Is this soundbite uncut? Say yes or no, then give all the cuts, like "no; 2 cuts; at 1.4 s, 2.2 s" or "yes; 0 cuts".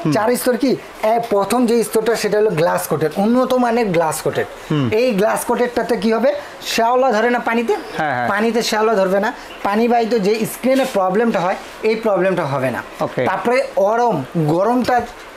yes; 0 cuts